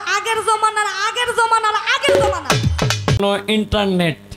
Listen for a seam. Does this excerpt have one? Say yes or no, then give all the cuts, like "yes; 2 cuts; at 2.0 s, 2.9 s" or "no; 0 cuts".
yes; 1 cut; at 3.2 s